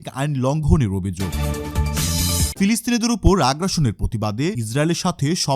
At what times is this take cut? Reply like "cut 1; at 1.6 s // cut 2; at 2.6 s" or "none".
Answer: cut 1; at 1.3 s // cut 2; at 2.5 s